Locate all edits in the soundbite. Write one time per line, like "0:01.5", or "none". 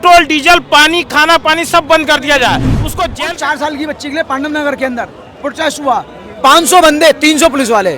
0:03.1